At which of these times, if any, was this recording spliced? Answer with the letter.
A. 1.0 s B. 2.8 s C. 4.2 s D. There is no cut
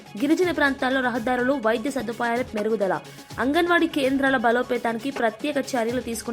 D